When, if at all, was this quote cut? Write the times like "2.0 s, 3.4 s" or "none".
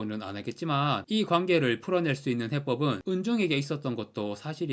none